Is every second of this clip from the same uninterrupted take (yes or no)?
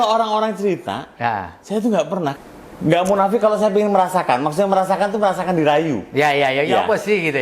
no